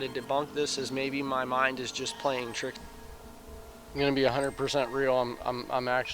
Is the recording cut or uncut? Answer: cut